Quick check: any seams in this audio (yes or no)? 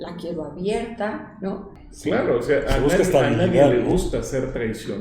yes